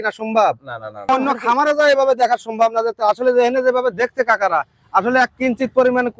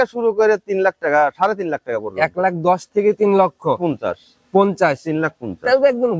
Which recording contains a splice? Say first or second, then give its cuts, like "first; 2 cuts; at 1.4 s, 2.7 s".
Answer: first; 1 cut; at 1.1 s